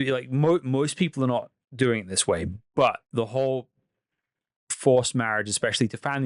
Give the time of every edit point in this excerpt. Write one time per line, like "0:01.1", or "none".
none